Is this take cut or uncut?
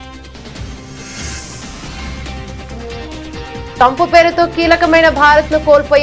uncut